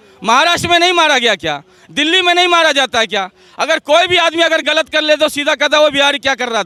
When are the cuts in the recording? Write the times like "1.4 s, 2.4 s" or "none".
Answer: none

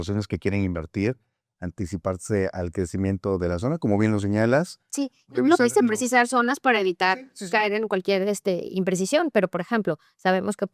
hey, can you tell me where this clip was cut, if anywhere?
none

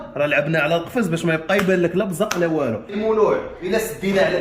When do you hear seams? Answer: 2.9 s

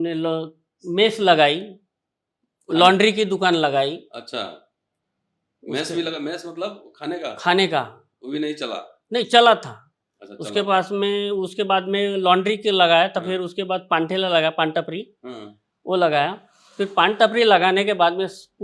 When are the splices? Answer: none

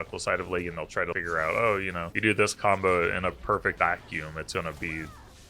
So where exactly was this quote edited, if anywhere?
1.1 s, 2.0 s, 3.8 s

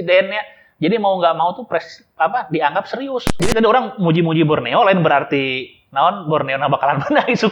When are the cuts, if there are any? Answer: 3.4 s

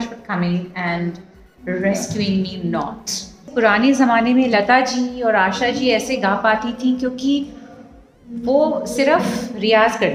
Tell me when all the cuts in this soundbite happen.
3.5 s

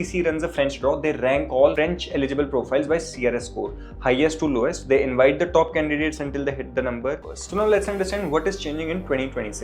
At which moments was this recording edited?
7.3 s

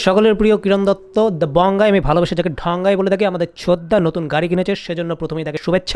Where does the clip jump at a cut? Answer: none

